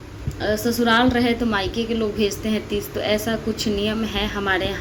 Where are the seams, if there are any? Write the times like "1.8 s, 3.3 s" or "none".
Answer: none